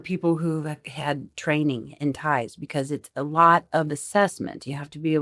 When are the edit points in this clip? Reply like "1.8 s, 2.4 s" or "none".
none